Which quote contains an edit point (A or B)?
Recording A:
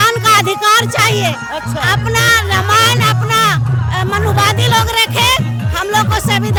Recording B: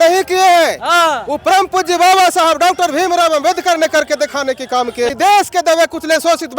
B